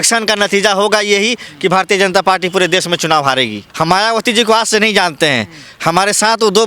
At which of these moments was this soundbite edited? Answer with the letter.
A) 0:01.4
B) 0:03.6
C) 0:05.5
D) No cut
B